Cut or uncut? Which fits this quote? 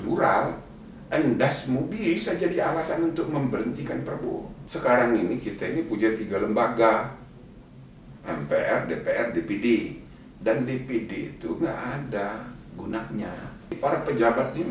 cut